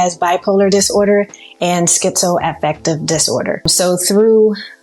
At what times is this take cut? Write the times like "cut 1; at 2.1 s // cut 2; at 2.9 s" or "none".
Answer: cut 1; at 3.7 s